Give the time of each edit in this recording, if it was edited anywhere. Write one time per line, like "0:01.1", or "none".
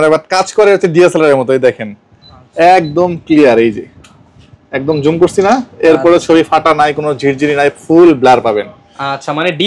none